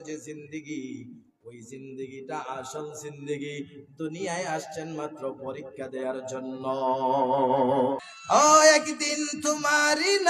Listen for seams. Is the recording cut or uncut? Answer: cut